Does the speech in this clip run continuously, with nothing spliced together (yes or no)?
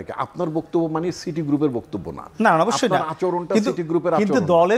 yes